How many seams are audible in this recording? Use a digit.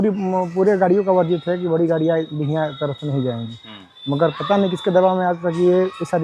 0